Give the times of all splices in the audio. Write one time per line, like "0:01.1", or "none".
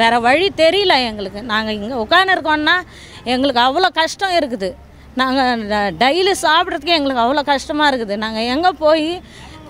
none